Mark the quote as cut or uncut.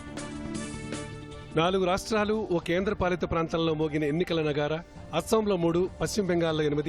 cut